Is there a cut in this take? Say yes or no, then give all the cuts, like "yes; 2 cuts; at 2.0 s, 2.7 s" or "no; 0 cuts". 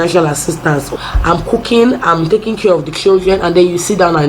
yes; 1 cut; at 1.0 s